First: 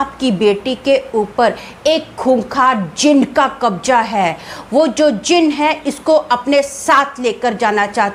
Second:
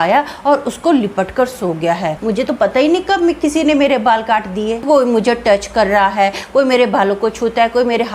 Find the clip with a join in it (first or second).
second